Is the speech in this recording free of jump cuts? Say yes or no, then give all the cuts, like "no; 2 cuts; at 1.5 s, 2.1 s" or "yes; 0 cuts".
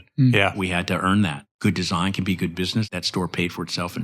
no; 2 cuts; at 1.4 s, 2.9 s